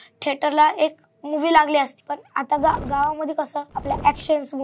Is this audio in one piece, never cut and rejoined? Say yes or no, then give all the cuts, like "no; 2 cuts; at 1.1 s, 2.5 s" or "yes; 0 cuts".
no; 2 cuts; at 2.6 s, 3.7 s